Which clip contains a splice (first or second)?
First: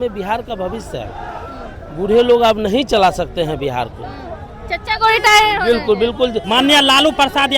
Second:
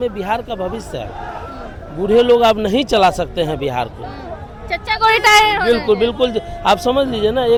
first